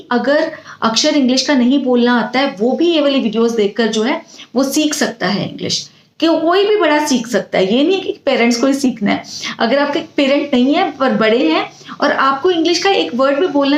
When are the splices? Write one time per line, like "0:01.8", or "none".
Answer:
none